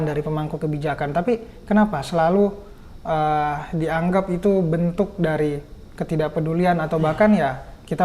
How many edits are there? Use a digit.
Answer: 0